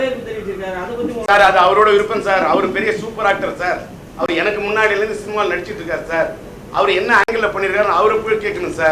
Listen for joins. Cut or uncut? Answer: uncut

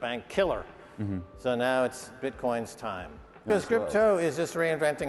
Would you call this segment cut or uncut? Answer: cut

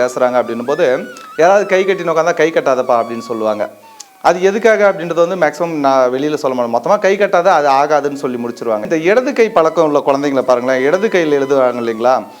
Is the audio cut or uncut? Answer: cut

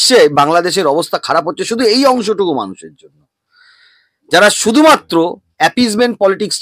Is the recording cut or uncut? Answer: uncut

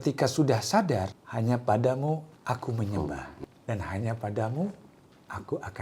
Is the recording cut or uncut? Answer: cut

